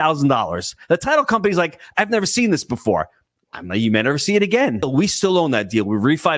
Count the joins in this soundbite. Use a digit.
1